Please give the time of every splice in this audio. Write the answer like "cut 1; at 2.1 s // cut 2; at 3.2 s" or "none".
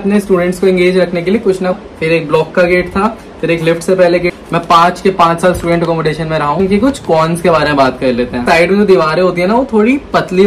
cut 1; at 1.8 s // cut 2; at 4.4 s // cut 3; at 6.6 s // cut 4; at 8.4 s